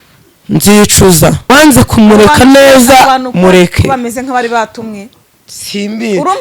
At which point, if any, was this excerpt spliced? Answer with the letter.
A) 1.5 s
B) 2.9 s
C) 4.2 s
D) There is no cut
A